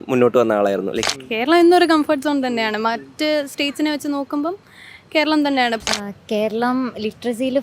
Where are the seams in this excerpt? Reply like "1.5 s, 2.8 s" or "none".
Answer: 1.0 s, 5.8 s